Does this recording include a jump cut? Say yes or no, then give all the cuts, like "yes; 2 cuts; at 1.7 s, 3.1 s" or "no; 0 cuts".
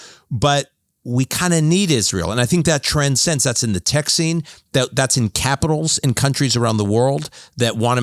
no; 0 cuts